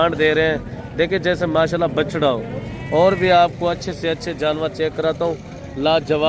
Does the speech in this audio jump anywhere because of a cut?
no; 0 cuts

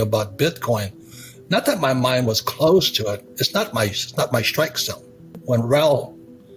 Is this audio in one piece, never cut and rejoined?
no; 1 cut; at 5.3 s

